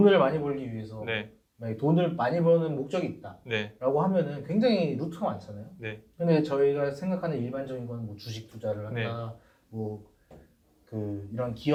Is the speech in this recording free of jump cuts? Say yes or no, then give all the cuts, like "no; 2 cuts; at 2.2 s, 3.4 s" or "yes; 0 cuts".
yes; 0 cuts